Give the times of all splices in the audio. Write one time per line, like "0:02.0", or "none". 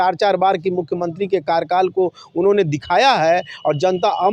none